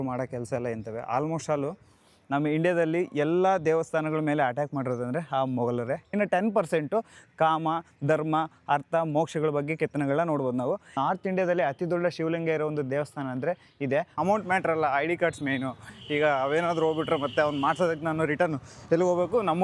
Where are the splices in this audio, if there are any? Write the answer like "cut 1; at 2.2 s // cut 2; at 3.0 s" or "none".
cut 1; at 6.1 s // cut 2; at 10.9 s // cut 3; at 14.1 s